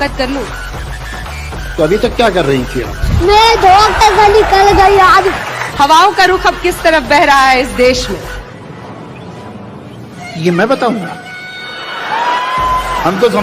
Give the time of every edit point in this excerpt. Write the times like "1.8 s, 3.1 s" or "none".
none